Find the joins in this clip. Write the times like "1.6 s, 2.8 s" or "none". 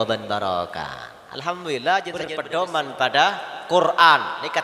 2.4 s